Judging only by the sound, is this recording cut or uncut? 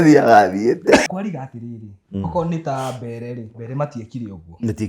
cut